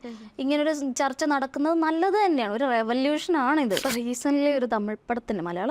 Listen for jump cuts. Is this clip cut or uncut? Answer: cut